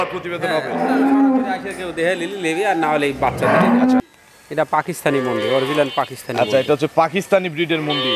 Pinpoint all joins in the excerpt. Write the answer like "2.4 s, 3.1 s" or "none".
4.0 s